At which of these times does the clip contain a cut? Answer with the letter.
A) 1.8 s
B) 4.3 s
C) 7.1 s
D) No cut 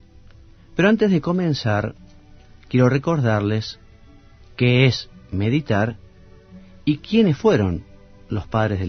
C